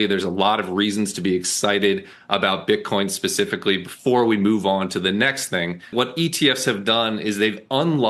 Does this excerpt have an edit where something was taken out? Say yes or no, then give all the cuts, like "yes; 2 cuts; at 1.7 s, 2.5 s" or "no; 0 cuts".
no; 0 cuts